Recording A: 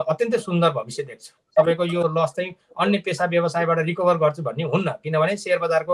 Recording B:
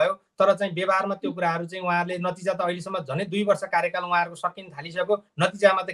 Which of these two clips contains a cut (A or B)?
A